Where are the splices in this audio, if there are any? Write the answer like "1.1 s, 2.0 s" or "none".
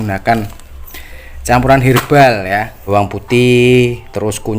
2.8 s